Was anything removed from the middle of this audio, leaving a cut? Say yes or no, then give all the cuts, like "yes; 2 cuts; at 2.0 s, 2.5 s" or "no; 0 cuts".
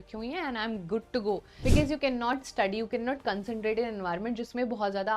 yes; 1 cut; at 1.5 s